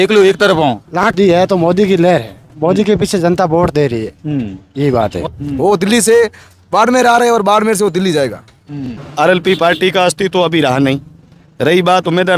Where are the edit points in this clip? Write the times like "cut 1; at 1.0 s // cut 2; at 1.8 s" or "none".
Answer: cut 1; at 1.1 s // cut 2; at 5.3 s // cut 3; at 9.0 s